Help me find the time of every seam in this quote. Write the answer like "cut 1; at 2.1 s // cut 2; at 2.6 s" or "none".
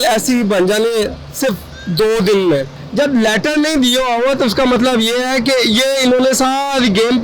cut 1; at 2.8 s